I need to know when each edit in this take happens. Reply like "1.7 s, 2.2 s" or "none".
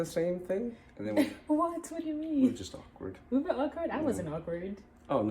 0.9 s